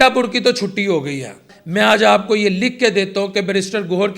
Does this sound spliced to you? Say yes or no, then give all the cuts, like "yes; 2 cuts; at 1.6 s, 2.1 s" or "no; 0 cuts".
yes; 1 cut; at 1.4 s